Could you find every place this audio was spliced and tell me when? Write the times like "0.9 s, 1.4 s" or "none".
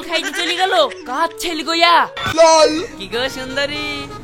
2.2 s